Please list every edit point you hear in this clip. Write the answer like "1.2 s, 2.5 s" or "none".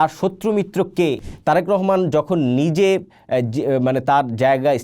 1.2 s